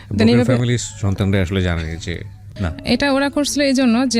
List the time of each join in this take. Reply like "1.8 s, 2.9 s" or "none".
2.6 s